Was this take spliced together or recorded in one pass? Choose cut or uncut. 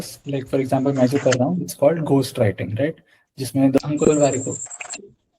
cut